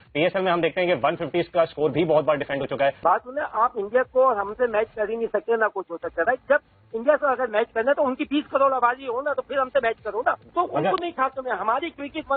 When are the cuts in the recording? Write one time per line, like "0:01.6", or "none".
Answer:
0:03.0
0:10.4